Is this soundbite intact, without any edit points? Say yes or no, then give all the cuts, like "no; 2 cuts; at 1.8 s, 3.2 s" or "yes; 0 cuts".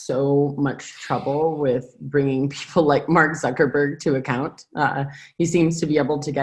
yes; 0 cuts